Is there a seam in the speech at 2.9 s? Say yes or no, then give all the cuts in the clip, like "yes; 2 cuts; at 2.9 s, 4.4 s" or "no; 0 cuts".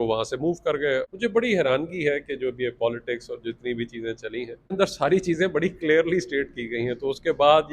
no; 2 cuts; at 1.1 s, 4.7 s